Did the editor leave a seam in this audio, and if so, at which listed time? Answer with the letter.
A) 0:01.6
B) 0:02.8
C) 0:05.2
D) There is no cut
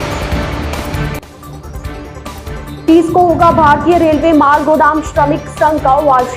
B